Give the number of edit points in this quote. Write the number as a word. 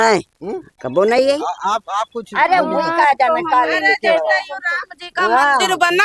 zero